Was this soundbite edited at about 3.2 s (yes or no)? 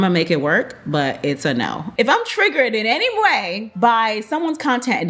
no